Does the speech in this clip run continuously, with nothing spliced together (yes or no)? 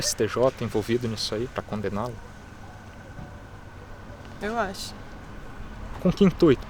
no